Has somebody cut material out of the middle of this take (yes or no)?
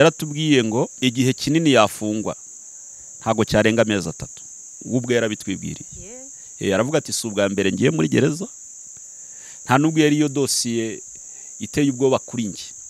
yes